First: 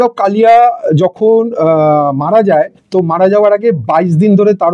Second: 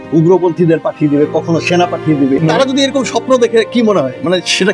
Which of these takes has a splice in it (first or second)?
second